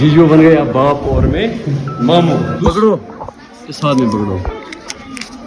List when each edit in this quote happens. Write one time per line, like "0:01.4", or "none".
0:02.5